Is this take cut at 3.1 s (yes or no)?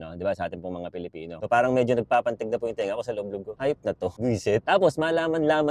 no